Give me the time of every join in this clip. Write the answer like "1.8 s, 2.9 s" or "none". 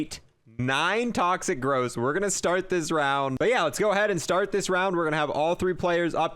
3.3 s

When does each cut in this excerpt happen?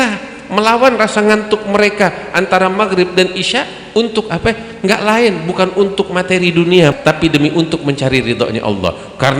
7.0 s

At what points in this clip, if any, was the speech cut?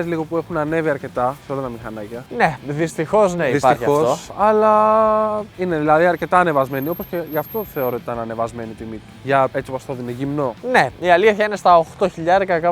none

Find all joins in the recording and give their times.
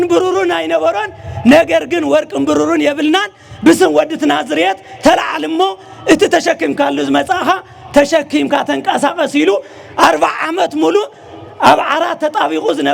none

